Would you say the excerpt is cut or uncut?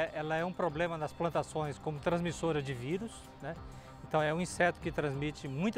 uncut